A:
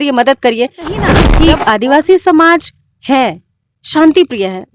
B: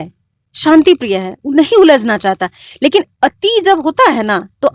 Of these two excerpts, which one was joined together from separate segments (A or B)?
A